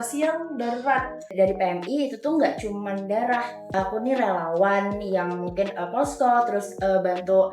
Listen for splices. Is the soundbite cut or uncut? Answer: cut